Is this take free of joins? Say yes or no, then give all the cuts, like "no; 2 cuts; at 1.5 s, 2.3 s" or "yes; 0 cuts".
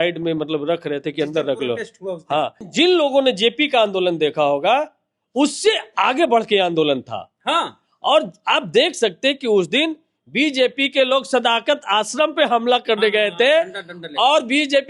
no; 1 cut; at 2.7 s